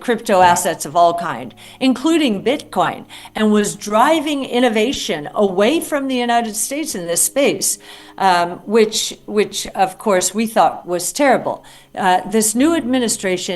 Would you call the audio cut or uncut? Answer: uncut